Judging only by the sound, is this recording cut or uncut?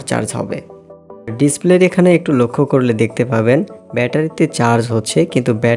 cut